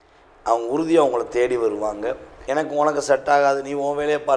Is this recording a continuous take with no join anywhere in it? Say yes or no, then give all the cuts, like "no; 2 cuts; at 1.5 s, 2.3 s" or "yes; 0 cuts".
no; 1 cut; at 2.3 s